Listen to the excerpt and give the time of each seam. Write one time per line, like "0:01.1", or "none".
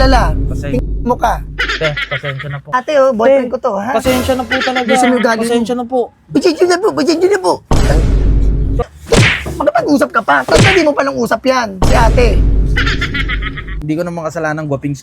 0:02.7
0:08.8
0:13.8